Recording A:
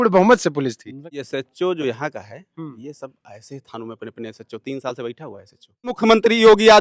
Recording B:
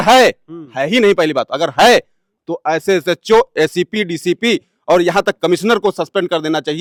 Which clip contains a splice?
A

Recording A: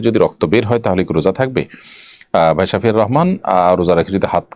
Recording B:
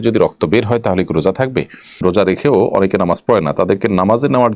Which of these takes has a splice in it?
B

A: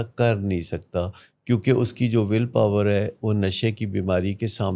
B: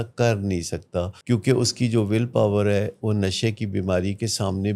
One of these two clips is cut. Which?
B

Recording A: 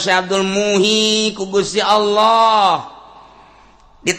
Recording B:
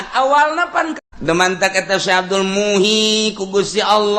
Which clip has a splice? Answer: B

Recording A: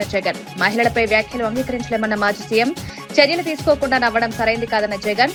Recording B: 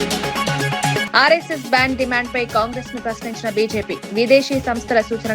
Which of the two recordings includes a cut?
B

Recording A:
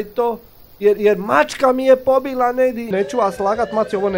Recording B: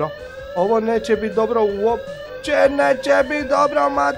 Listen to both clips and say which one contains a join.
A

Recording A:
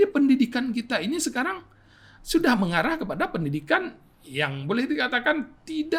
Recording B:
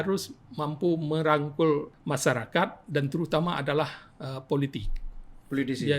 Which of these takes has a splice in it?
B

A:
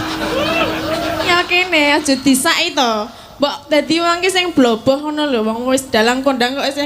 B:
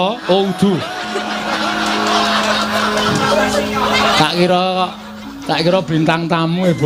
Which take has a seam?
A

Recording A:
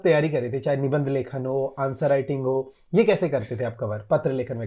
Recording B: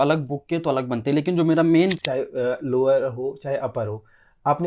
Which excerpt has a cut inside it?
B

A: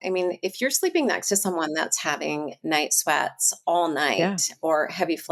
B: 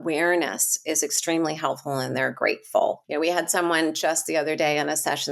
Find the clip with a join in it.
B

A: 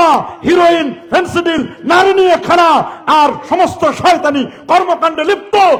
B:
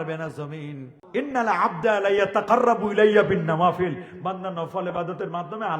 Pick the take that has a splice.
B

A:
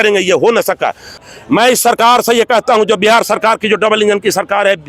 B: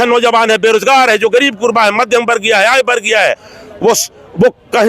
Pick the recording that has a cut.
A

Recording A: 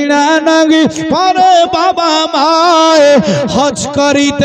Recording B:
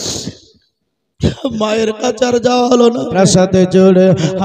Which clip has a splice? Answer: B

